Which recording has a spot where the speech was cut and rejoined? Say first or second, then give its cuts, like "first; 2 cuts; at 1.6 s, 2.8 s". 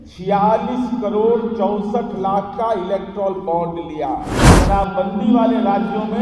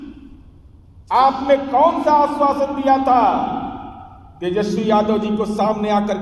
first; 1 cut; at 4.4 s